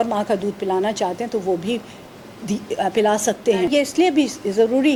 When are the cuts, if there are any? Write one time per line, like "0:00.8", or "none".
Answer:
none